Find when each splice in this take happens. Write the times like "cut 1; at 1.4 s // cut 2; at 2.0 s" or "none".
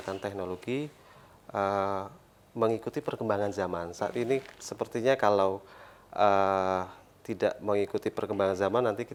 none